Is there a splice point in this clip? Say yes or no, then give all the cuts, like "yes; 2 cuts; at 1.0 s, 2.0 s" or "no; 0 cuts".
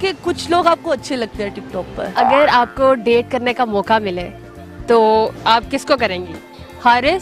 yes; 1 cut; at 1.9 s